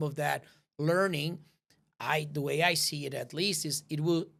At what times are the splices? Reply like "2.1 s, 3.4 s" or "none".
none